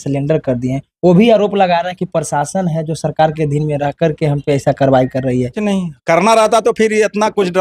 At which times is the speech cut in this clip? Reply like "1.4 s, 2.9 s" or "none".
5.6 s